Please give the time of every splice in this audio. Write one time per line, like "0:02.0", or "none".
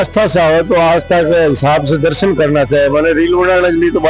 none